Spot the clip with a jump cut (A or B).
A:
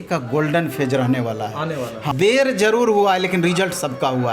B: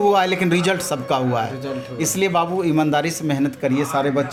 A